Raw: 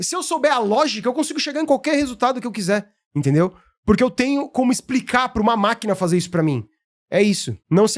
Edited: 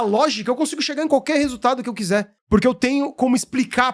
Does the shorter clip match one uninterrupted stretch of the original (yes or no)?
no